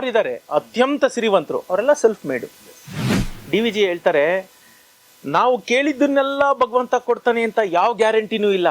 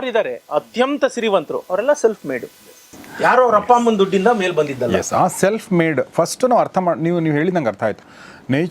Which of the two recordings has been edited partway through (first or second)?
first